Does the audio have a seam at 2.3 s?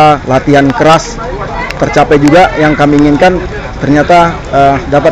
no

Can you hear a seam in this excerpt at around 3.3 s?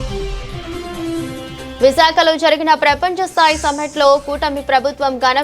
no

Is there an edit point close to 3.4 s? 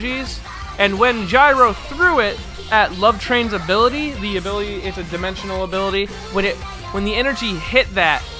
yes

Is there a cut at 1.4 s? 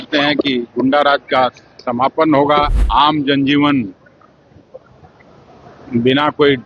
no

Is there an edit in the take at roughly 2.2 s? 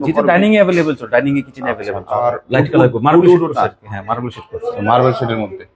yes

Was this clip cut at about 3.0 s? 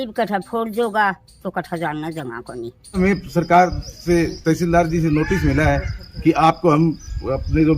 yes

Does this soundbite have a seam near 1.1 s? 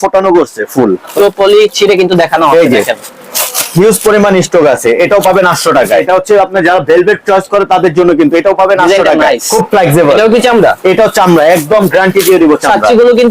yes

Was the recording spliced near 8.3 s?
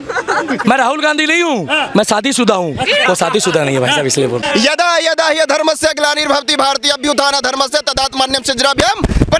no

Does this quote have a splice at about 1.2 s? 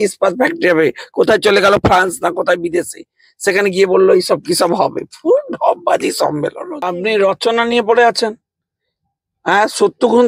no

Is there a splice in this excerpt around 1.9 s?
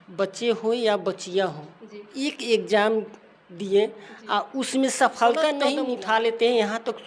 no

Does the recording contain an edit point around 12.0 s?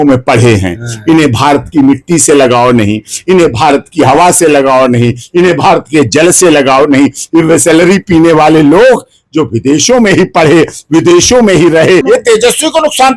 yes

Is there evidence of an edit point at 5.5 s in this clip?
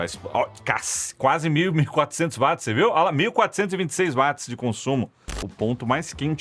yes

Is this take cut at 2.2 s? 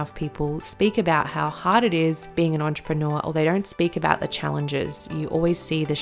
yes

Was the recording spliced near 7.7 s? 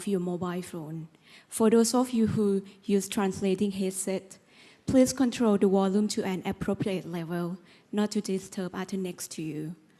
yes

